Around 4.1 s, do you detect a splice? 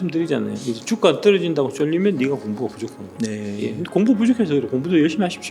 no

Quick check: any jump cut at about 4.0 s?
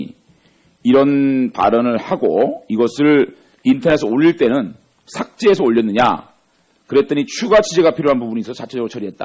no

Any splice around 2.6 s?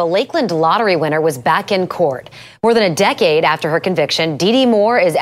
no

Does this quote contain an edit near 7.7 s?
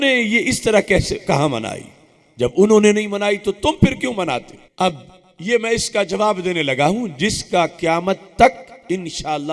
no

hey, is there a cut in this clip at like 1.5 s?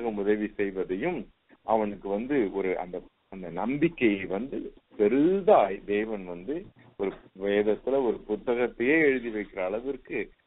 no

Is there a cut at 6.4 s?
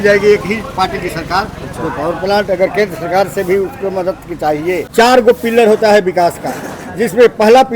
no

